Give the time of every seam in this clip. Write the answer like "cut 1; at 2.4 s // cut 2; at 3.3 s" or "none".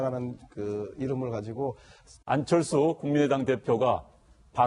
none